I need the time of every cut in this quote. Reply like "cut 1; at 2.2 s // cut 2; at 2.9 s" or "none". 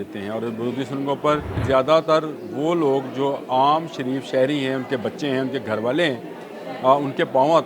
cut 1; at 1.6 s